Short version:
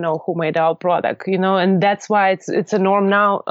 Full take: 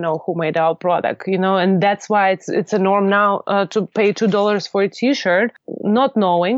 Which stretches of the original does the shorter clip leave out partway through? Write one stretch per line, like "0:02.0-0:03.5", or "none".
none